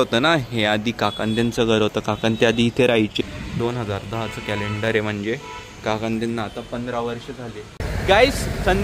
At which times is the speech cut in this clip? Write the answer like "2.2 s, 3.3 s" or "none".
3.1 s, 7.7 s